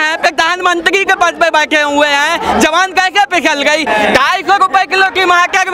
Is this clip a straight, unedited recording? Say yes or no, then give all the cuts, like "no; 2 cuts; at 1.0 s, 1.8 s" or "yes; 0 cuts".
no; 1 cut; at 3.9 s